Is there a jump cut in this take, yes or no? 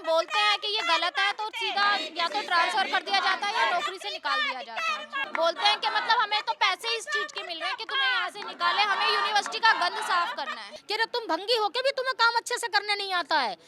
yes